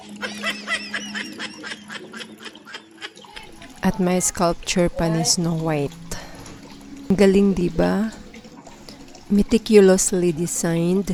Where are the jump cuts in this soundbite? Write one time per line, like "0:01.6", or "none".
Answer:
none